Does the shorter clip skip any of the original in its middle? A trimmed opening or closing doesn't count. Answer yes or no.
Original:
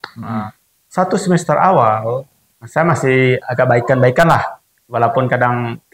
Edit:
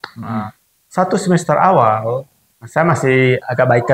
no